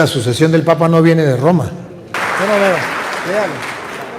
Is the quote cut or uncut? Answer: cut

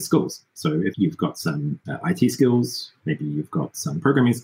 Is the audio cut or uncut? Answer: cut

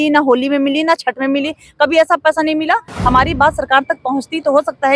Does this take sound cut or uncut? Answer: cut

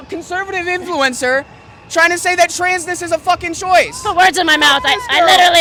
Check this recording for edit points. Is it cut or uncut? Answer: uncut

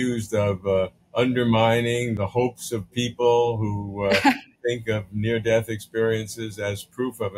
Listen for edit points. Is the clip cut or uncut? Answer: cut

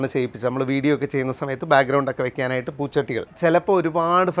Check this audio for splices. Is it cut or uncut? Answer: cut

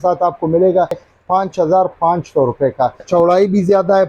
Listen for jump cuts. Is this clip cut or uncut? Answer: cut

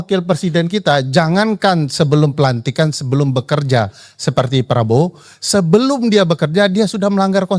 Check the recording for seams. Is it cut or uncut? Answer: uncut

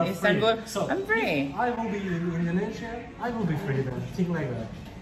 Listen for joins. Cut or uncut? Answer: uncut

